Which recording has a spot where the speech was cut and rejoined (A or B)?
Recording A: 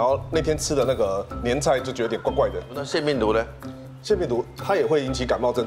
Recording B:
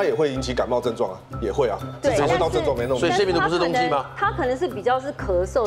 A